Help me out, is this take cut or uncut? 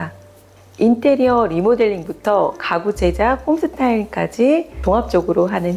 cut